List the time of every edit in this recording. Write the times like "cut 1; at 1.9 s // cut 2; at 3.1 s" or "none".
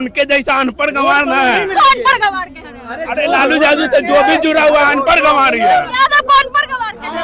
none